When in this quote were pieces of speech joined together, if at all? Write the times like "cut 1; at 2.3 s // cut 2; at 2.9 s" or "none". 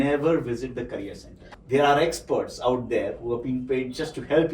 cut 1; at 1.5 s